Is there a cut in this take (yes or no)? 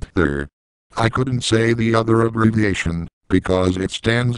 yes